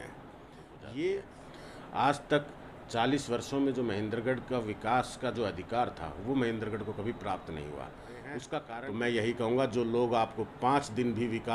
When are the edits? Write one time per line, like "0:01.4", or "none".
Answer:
0:01.3
0:08.7